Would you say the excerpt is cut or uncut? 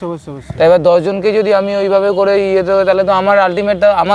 uncut